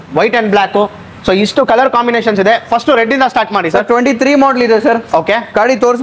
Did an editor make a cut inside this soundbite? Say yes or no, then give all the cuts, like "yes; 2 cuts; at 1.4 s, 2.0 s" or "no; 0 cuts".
no; 0 cuts